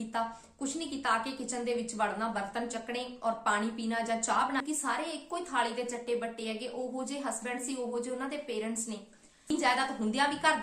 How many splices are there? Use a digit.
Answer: 2